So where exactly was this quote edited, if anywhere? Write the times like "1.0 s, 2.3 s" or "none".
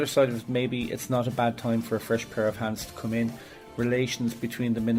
none